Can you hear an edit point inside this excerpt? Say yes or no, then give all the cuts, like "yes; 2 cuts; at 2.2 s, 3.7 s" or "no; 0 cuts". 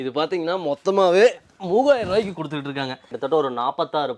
no; 0 cuts